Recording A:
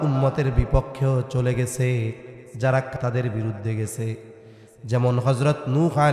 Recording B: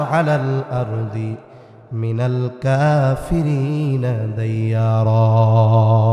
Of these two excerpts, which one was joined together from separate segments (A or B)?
A